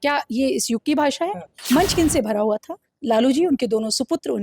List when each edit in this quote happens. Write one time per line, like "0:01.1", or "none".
0:01.5

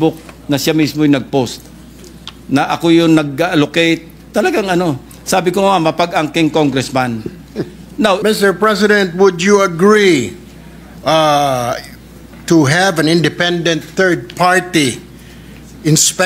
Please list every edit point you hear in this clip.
0:08.2

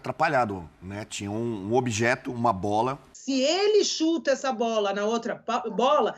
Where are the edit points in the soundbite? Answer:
0:03.1

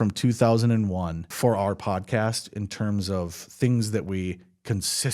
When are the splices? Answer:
0:01.3

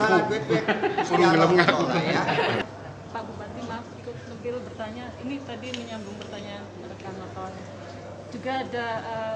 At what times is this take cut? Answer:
0:02.6

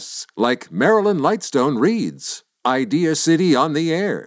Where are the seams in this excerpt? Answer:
none

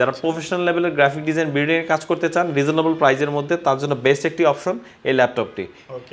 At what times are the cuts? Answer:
none

